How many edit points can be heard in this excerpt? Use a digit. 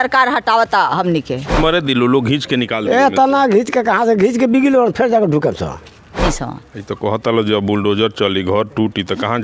2